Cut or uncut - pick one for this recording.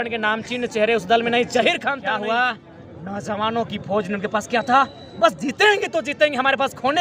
cut